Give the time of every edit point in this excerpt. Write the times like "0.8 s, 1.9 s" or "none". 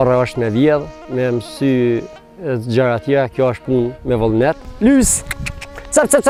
none